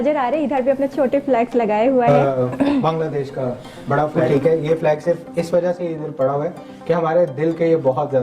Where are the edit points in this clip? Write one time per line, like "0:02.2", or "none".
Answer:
0:02.1
0:04.2